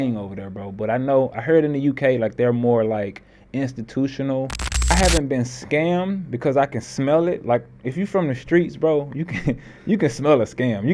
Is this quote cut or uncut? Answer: cut